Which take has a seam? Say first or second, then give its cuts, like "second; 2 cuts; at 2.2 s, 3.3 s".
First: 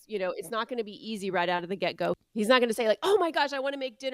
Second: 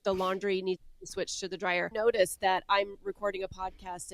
second; 1 cut; at 1.9 s